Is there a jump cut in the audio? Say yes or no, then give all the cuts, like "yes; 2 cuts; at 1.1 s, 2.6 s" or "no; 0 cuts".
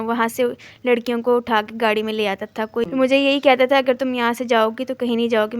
yes; 1 cut; at 2.9 s